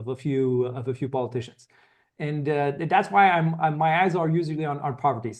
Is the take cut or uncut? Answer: uncut